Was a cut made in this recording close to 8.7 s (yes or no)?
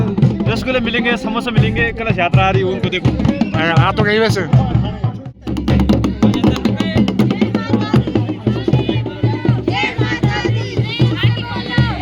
no